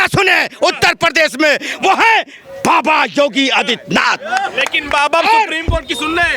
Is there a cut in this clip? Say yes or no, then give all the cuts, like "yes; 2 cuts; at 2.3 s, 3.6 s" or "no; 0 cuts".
no; 0 cuts